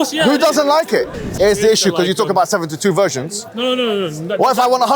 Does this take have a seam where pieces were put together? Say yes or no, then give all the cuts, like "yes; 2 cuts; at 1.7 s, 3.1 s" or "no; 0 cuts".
yes; 1 cut; at 1.2 s